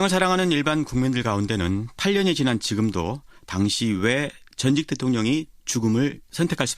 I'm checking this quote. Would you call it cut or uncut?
cut